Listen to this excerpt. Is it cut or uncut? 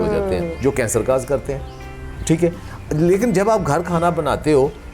uncut